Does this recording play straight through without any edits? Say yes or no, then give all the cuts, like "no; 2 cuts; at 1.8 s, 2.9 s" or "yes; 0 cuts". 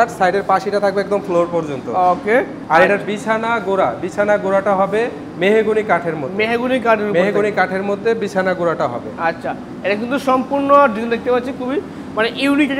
yes; 0 cuts